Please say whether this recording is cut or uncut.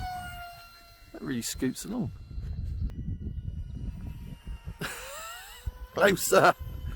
cut